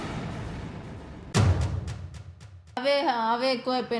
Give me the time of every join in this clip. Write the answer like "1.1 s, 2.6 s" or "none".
2.8 s